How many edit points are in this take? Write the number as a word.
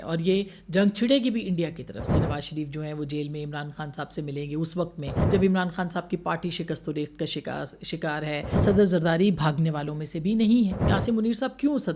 four